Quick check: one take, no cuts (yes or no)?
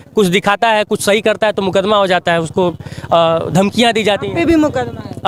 yes